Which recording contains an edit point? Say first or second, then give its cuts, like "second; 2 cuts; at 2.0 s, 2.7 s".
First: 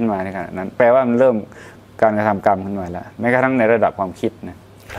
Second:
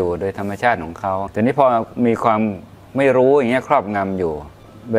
second; 1 cut; at 1.3 s